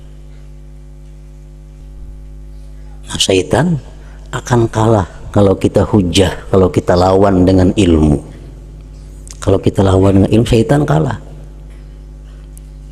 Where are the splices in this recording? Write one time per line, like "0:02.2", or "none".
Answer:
0:01.8